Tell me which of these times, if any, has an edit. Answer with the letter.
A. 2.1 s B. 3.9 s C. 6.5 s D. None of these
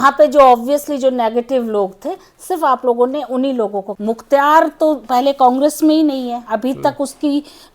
B